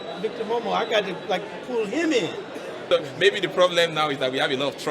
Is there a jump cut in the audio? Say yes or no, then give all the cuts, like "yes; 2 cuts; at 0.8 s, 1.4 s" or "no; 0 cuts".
yes; 1 cut; at 2.8 s